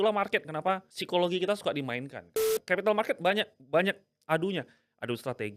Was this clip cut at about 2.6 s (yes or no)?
yes